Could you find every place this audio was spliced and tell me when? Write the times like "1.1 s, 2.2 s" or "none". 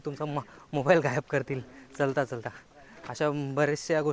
none